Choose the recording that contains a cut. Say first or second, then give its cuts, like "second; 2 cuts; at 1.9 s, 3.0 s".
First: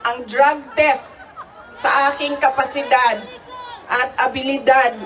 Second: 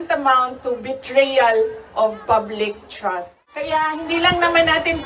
second; 1 cut; at 3.7 s